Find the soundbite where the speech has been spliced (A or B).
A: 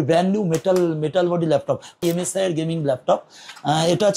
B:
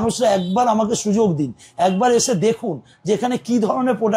A